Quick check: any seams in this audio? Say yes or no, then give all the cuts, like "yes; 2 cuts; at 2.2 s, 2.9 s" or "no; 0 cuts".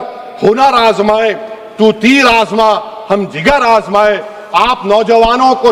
no; 0 cuts